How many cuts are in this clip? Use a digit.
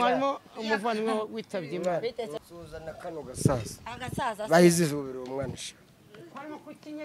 1